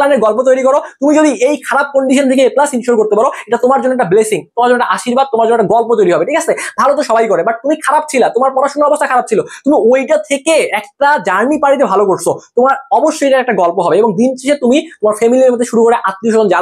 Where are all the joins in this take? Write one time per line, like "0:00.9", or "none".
none